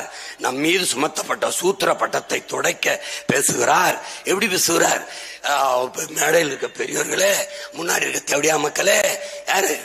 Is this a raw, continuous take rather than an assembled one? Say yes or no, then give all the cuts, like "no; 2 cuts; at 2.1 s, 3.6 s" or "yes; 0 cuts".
yes; 0 cuts